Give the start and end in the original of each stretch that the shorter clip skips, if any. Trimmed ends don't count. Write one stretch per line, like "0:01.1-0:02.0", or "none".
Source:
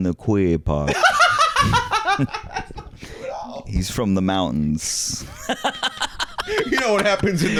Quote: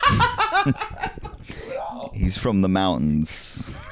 none